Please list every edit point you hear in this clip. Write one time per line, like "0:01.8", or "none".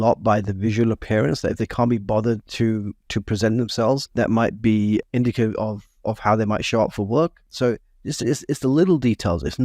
0:04.1
0:05.0
0:07.5